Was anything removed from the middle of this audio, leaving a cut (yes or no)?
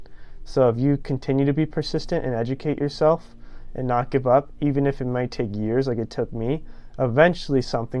no